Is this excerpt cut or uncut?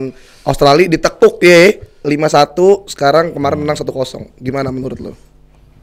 uncut